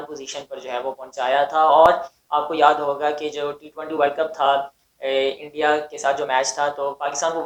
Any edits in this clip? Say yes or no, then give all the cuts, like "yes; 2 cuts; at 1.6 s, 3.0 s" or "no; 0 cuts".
no; 0 cuts